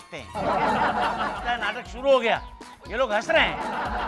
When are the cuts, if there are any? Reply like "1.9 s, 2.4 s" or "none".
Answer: 1.3 s

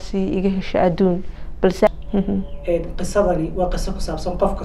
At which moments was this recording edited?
1.9 s

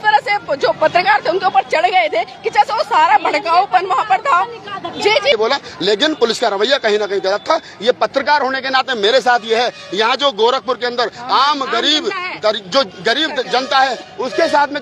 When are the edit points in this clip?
5.3 s

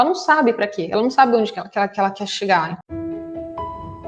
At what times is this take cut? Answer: 2.8 s

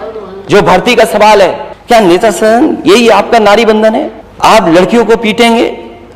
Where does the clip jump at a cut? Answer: 1.7 s, 4.2 s

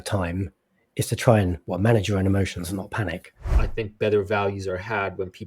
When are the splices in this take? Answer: 3.5 s

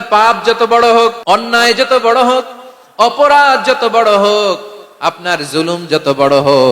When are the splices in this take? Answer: 1.2 s

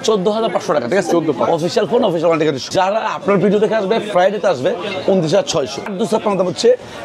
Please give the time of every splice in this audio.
2.6 s, 5.9 s

